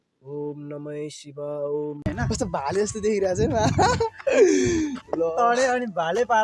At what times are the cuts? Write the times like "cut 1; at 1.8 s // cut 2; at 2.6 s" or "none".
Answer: cut 1; at 2.1 s